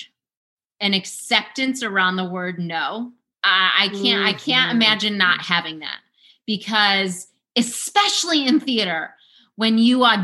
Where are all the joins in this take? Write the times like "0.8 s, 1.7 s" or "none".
3.4 s